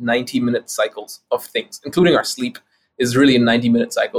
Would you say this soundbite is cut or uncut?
uncut